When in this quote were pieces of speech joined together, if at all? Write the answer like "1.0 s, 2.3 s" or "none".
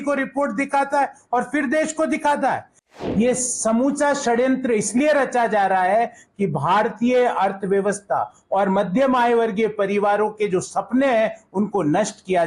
3.0 s